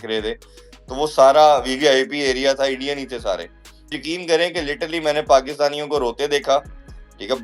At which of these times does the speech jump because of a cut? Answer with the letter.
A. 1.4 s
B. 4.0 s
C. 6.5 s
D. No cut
B